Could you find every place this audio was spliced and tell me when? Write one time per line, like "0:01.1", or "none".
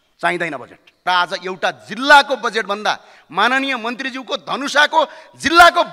0:01.1